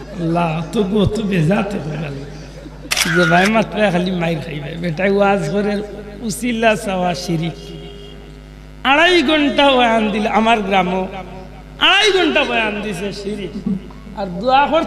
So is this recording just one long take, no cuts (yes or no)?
no